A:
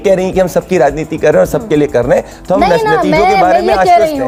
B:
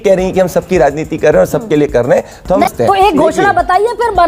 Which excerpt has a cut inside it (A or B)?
B